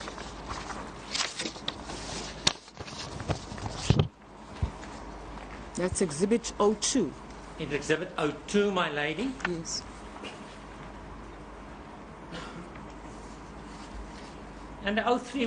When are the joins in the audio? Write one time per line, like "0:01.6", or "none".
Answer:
0:03.3